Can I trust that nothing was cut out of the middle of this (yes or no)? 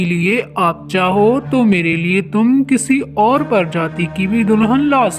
yes